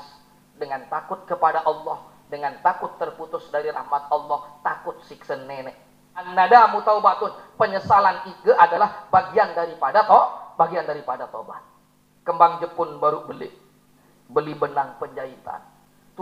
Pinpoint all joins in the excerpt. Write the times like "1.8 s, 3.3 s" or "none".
6.3 s